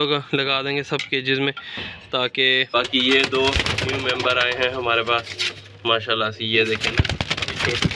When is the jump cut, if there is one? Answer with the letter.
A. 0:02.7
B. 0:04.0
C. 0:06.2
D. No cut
A